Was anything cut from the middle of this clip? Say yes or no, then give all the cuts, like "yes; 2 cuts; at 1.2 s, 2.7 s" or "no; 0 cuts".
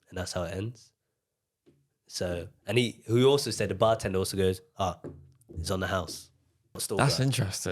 yes; 1 cut; at 6.8 s